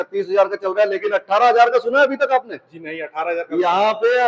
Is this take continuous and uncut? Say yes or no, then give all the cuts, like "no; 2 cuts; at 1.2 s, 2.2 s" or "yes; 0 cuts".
yes; 0 cuts